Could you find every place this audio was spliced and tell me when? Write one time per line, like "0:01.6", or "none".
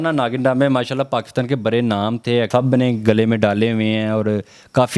0:02.5